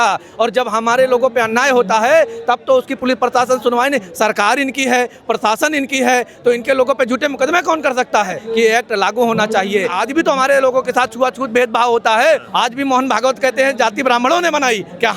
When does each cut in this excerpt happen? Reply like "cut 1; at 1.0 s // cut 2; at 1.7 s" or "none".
cut 1; at 8.4 s // cut 2; at 10.0 s // cut 3; at 12.5 s